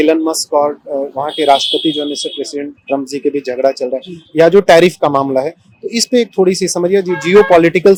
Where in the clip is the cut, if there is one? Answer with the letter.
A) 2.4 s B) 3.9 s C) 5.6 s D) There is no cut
D